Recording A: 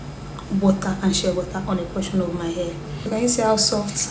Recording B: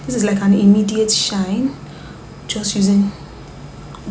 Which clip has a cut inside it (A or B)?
A